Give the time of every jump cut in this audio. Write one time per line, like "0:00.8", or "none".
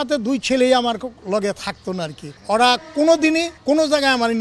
0:02.3
0:03.5

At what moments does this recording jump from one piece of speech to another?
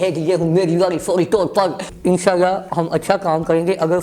0:01.9

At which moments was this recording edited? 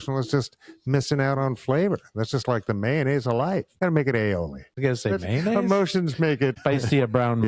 0:03.7
0:04.6
0:06.5

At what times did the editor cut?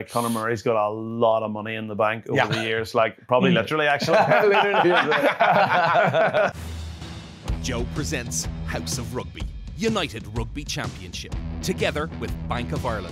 0:06.5

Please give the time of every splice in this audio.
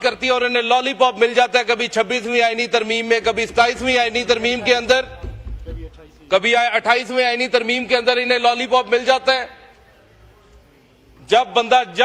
none

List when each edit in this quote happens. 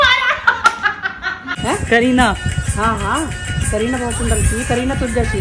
0:01.5

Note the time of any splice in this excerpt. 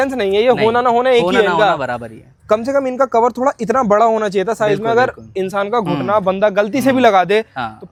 none

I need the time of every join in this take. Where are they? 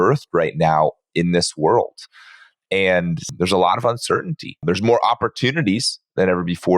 0:03.3
0:04.6

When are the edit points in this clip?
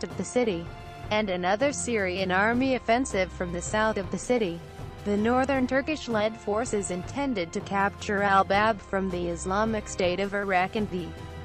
0:03.3

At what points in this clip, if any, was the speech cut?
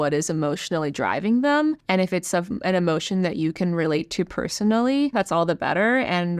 0:05.1

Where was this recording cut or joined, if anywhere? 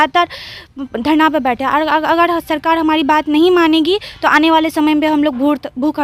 none

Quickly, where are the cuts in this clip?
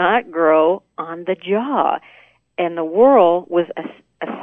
0:02.5

